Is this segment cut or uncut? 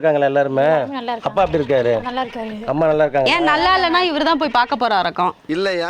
uncut